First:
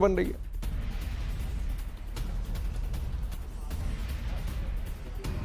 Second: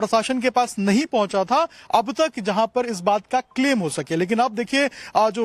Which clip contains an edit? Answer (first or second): first